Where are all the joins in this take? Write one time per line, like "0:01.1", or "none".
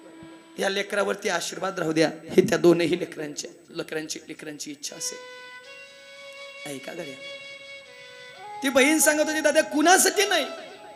none